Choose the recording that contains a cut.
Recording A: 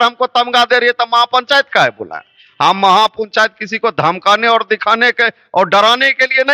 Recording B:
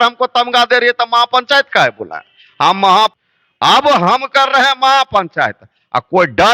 B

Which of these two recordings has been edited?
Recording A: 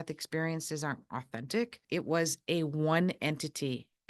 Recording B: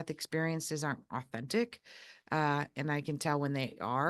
A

